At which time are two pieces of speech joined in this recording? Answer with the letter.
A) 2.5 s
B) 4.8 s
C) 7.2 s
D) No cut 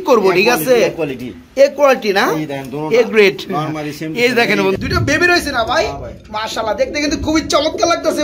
B